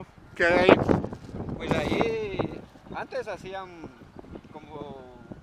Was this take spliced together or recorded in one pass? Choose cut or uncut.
uncut